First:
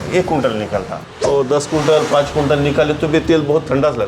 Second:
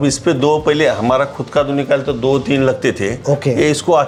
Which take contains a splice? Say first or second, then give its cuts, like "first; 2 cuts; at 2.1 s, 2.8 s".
first; 1 cut; at 1.0 s